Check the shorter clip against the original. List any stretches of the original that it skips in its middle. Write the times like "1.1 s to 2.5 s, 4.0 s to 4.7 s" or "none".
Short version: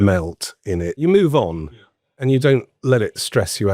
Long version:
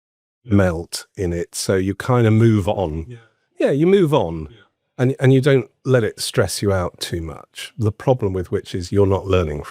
1.5 s to 3.8 s, 4.9 s to 5.2 s

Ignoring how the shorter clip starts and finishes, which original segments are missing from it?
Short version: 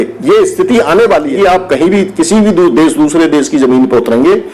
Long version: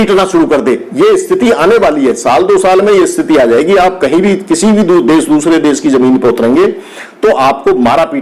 2.0 s to 3.6 s

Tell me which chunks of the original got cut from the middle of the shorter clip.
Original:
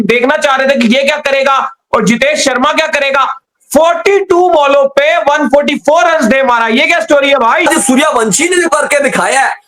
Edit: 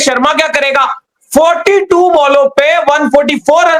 none

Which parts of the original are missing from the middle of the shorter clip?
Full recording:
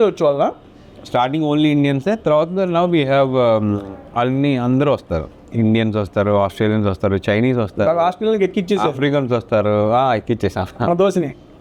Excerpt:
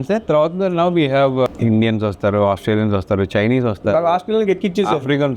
3.4 s to 5.4 s

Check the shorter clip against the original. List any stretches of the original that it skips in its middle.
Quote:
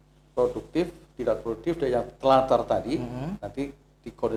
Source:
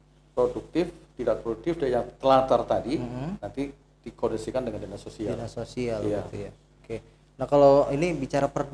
none

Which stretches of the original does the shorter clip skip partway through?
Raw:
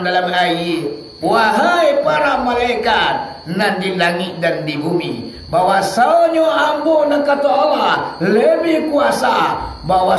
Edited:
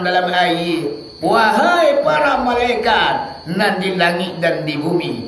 none

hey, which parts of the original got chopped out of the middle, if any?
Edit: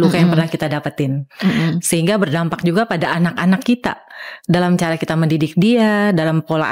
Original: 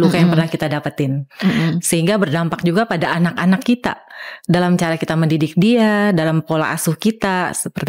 none

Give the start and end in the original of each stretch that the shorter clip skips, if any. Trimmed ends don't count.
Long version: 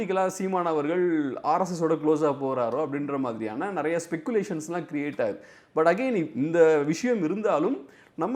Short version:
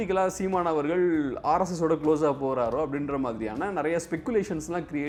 none

